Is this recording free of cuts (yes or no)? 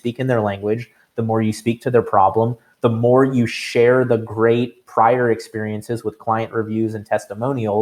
yes